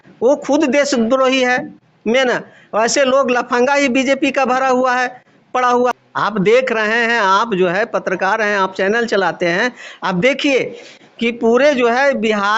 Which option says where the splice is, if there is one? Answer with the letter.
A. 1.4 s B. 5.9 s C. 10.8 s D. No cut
B